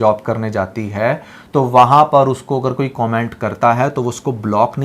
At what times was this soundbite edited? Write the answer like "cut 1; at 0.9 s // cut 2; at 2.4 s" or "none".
none